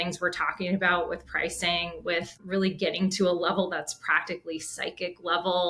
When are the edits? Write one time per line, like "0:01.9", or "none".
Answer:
0:02.4